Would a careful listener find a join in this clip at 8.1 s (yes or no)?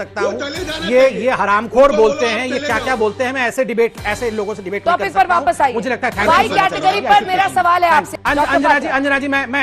yes